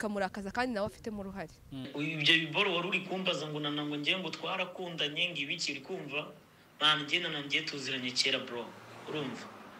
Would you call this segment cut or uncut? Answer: cut